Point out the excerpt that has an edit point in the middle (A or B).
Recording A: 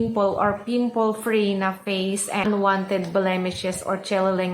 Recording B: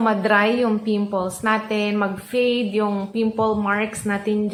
A